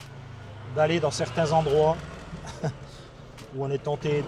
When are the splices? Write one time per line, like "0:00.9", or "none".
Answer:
none